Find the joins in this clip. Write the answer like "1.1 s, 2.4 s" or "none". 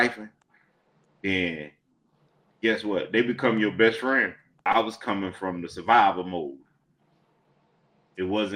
4.6 s